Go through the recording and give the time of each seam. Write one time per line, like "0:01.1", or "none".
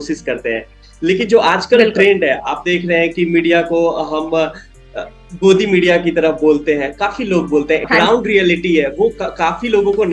0:07.8